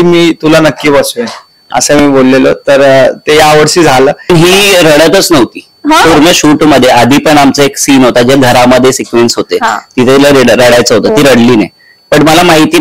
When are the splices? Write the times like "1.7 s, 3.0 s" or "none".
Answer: 4.3 s